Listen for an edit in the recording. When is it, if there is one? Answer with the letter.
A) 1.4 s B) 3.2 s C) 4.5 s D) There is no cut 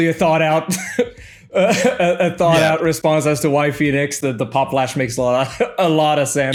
D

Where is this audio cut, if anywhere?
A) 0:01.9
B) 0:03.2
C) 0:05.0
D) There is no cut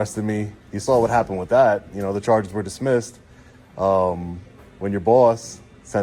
D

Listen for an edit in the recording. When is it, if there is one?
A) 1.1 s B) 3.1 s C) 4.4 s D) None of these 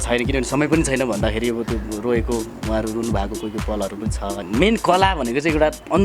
C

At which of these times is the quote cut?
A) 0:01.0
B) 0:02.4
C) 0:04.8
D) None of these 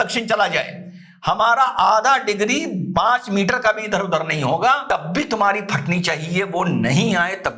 C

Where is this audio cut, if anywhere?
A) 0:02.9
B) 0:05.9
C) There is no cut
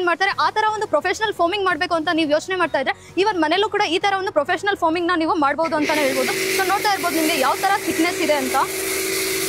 C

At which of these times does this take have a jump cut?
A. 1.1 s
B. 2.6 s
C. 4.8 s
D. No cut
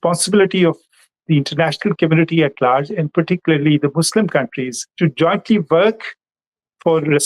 C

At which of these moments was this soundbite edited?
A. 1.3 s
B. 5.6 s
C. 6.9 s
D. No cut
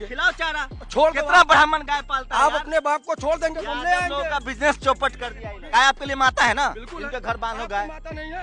B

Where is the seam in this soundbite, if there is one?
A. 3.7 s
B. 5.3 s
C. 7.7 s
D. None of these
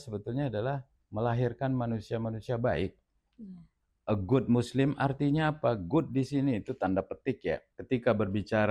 C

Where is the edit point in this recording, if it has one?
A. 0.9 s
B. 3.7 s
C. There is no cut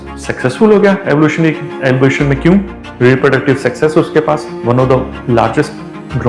C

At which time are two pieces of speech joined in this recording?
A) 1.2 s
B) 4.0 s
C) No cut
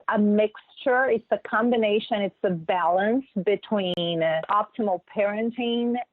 B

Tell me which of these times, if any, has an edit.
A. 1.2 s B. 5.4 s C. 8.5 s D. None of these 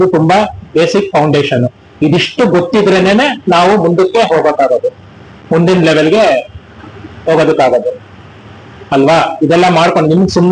D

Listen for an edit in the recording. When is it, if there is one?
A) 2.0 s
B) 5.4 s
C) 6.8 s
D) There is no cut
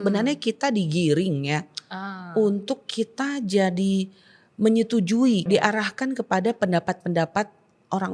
B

